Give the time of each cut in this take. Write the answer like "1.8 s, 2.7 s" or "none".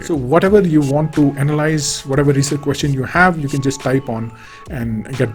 none